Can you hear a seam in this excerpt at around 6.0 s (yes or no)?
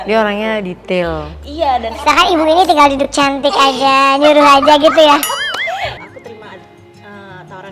yes